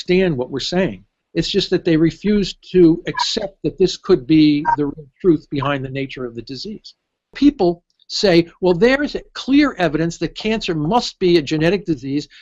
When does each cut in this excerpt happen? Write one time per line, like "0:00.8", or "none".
0:07.3